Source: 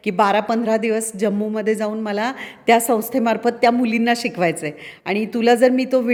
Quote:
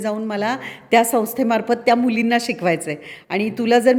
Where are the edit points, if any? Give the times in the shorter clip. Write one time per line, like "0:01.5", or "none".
none